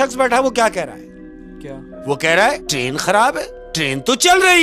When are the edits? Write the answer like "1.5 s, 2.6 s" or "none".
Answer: 2.7 s, 3.6 s